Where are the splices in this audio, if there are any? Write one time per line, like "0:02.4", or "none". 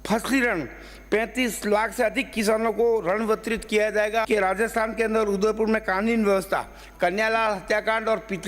0:04.3